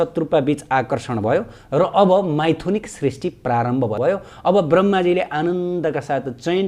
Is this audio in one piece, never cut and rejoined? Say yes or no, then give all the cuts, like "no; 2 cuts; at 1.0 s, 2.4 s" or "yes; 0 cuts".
no; 1 cut; at 4.0 s